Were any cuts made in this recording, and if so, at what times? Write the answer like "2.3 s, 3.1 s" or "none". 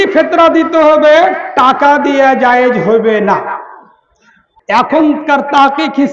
4.4 s